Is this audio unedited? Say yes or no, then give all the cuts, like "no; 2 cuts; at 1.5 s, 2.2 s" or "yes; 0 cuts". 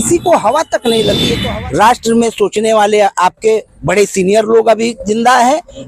no; 1 cut; at 1.3 s